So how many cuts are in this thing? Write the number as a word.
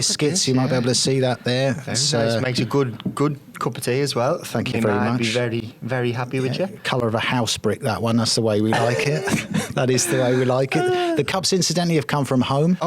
zero